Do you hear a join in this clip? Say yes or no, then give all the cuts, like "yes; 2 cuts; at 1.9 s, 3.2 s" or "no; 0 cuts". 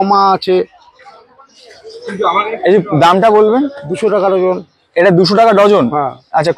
no; 0 cuts